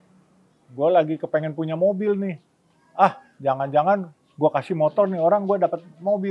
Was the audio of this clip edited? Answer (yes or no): no